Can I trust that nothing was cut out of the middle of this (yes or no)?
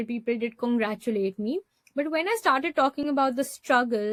yes